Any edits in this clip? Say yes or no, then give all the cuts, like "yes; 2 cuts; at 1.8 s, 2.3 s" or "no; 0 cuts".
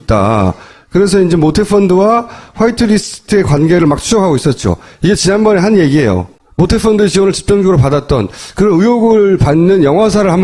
yes; 1 cut; at 4.4 s